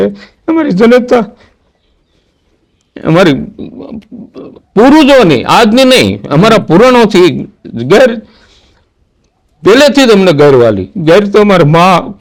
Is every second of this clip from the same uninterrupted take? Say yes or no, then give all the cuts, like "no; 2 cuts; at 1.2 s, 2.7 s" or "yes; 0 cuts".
yes; 0 cuts